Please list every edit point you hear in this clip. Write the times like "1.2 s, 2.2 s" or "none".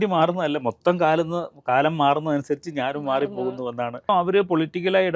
4.1 s